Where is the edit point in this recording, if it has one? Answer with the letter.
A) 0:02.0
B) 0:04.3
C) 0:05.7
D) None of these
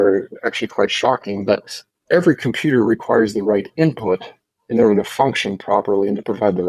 D